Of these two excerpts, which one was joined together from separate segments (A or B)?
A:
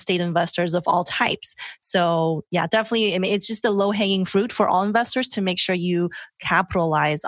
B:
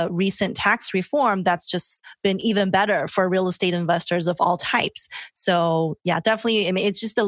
B